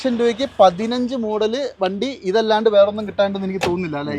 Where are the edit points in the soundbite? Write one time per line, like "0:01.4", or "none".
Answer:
none